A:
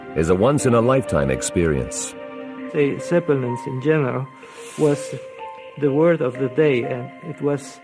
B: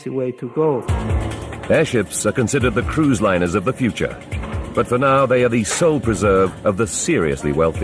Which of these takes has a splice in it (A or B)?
B